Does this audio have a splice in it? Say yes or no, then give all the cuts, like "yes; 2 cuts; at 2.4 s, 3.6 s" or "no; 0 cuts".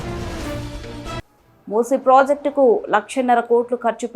yes; 1 cut; at 1.2 s